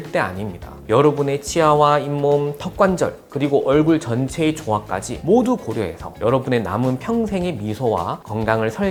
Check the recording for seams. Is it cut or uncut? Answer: uncut